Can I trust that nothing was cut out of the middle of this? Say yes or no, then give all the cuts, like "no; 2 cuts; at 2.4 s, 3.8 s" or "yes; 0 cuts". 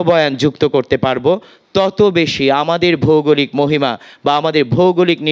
yes; 0 cuts